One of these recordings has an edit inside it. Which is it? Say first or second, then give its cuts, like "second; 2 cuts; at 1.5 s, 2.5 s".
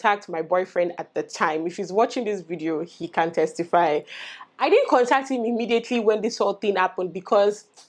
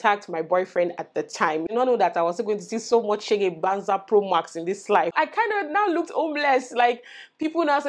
second; 2 cuts; at 1.7 s, 5.1 s